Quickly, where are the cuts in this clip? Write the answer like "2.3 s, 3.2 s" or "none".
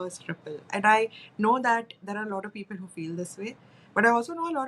none